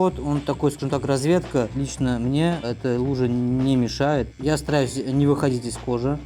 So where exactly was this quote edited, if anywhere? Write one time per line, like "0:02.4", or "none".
0:01.7
0:04.3